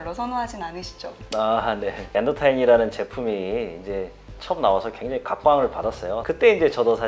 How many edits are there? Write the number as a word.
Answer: zero